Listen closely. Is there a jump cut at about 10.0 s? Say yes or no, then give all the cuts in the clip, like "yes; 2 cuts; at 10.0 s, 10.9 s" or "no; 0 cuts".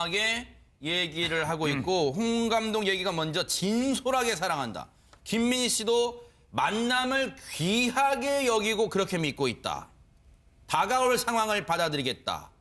no; 1 cut; at 6.2 s